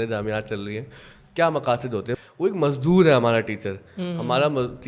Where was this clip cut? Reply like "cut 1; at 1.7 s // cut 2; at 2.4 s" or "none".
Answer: cut 1; at 2.2 s